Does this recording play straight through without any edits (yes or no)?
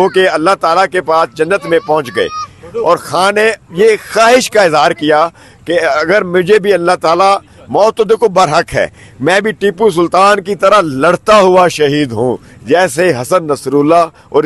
yes